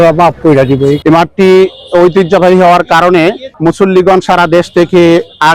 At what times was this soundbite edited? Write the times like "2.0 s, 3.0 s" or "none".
1.0 s